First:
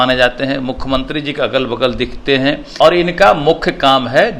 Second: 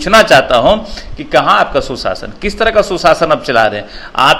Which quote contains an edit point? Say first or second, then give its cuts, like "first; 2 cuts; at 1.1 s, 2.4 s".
first; 1 cut; at 2.7 s